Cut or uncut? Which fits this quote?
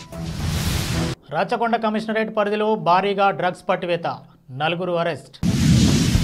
cut